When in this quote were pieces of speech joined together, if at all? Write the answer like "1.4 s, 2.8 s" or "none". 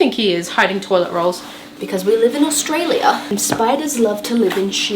1.7 s, 3.2 s